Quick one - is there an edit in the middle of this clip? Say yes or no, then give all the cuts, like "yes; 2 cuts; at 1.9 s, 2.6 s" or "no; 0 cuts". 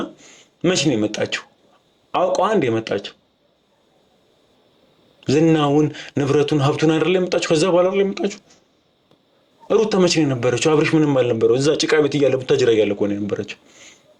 no; 0 cuts